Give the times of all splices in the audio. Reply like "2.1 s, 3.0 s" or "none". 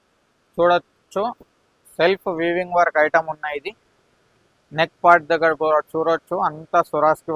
none